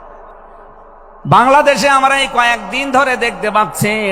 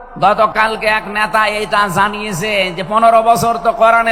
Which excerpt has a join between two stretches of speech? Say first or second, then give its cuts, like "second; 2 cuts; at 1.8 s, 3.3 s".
first; 1 cut; at 1.2 s